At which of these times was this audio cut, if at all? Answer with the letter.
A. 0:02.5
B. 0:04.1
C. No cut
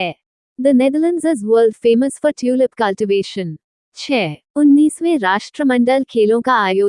B